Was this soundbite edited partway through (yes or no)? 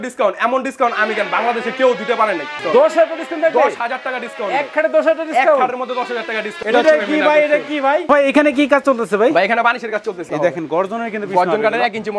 yes